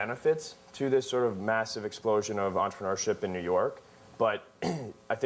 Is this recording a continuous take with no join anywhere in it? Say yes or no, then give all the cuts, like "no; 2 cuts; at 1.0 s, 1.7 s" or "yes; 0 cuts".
no; 1 cut; at 3.4 s